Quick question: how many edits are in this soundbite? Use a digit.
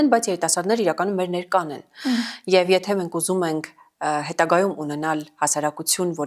0